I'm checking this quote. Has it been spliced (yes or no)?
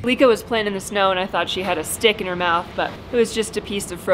yes